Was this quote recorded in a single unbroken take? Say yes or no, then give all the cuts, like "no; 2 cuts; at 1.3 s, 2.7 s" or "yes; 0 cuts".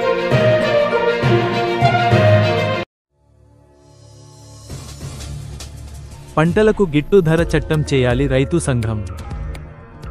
yes; 0 cuts